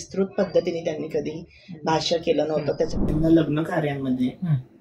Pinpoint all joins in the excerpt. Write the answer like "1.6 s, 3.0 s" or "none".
3.0 s